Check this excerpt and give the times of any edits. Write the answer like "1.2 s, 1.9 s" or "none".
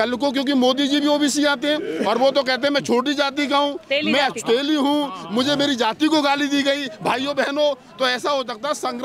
none